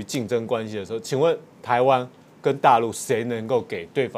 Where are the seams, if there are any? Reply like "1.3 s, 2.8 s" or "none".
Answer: none